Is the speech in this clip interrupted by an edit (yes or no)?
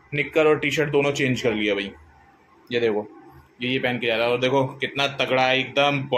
no